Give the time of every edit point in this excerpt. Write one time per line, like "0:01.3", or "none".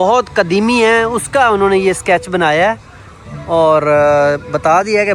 none

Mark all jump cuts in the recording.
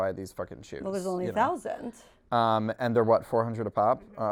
none

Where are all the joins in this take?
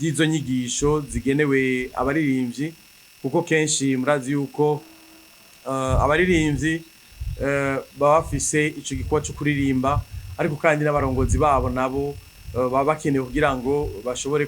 none

